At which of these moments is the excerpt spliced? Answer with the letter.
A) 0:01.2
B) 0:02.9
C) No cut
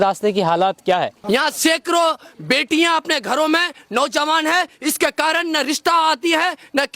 A